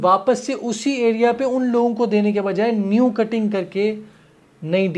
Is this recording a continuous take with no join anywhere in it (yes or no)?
yes